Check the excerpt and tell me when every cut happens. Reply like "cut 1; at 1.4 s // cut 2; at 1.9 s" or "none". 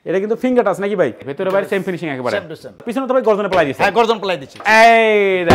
cut 1; at 1.2 s // cut 2; at 2.8 s // cut 3; at 4.5 s